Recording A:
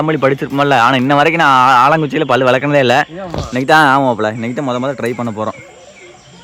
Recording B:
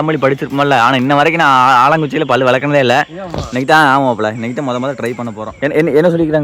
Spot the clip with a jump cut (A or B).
B